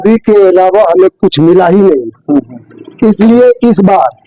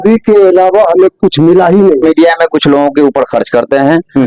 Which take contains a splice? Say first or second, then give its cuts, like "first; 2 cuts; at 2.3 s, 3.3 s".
second; 1 cut; at 2.0 s